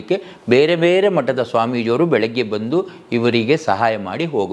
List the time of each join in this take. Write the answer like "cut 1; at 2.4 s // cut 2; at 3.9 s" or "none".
none